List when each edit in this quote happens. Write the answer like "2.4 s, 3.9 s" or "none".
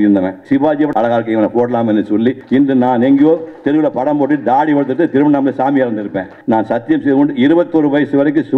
0.7 s, 2.4 s, 6.3 s